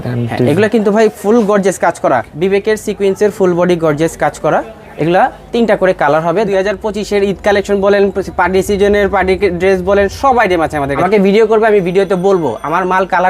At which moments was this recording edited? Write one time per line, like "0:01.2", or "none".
0:02.3
0:06.5
0:10.9